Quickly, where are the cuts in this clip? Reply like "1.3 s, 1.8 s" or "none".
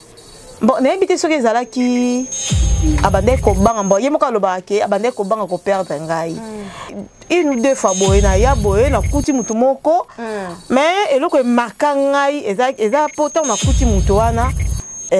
6.9 s

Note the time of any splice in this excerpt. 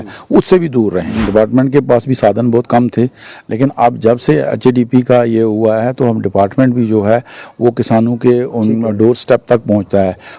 1.1 s

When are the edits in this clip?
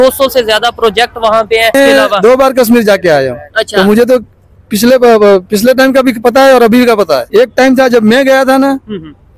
1.7 s, 7.2 s

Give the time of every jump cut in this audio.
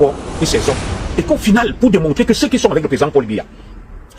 0.9 s

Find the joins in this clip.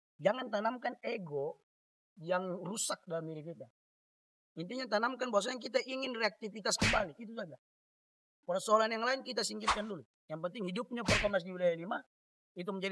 none

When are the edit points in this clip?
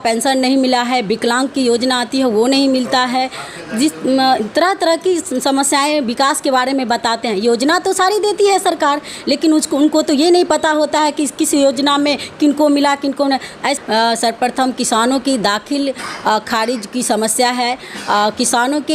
13.8 s

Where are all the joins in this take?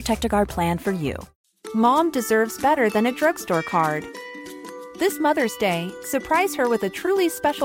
1.3 s

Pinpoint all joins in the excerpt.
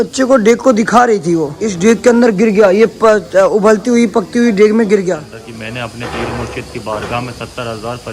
1.6 s, 5.4 s

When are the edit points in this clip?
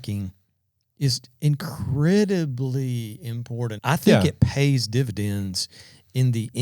3.8 s

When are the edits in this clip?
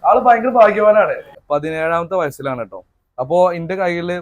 1.3 s

